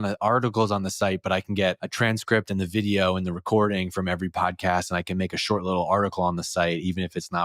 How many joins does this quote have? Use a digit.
1